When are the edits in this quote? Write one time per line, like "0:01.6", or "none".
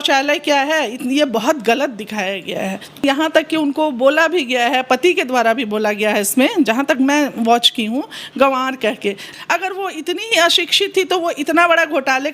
0:03.0
0:09.3

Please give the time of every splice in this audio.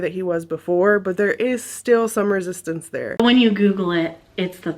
0:03.2

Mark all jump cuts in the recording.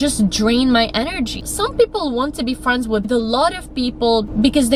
none

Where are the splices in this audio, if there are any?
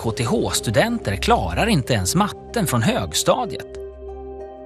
0:03.4

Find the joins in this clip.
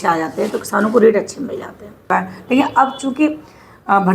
0:02.0

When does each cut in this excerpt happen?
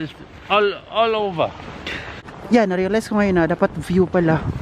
0:02.3

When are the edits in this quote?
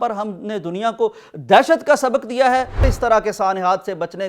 0:02.9

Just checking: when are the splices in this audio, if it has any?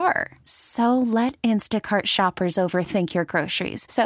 none

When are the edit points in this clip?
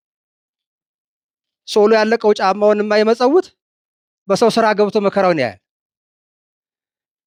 none

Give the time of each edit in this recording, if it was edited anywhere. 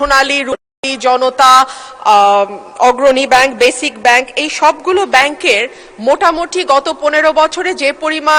none

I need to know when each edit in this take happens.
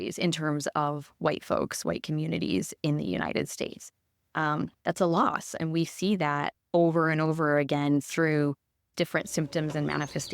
0:08.9

